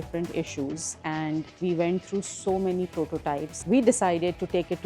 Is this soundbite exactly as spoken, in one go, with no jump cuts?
no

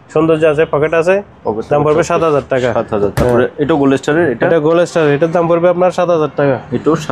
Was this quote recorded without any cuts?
yes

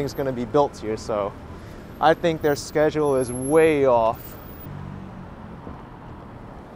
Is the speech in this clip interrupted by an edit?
yes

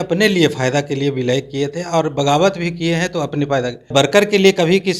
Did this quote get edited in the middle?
yes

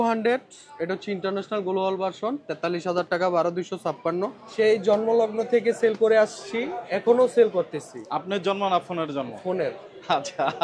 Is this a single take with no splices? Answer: no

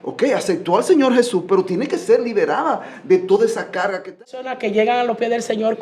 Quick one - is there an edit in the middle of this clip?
yes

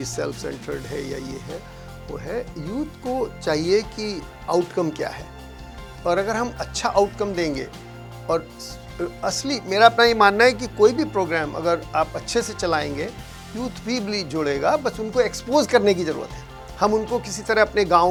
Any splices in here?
no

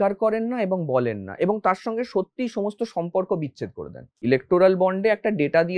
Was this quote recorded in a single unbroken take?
no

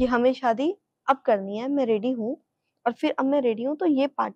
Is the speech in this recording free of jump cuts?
yes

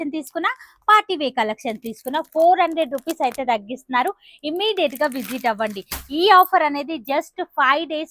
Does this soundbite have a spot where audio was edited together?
no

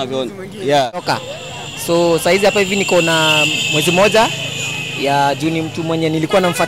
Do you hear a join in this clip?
yes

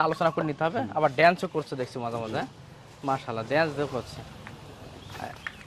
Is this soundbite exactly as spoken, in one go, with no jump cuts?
yes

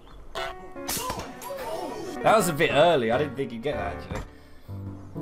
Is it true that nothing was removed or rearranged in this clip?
yes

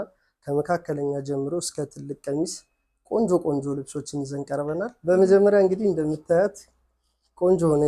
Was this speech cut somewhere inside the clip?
yes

